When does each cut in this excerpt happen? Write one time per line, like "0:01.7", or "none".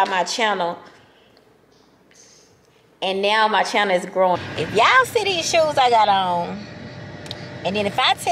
0:04.4